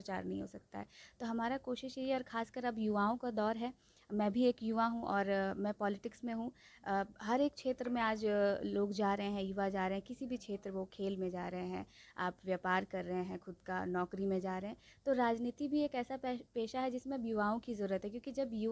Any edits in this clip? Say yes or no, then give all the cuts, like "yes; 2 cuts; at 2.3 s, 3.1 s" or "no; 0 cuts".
no; 0 cuts